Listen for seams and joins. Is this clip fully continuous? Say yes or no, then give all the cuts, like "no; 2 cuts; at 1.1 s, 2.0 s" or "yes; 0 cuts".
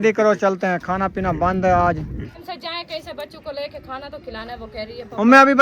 no; 1 cut; at 2.4 s